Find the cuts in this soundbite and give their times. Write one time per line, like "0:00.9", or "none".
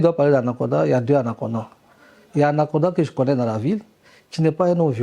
none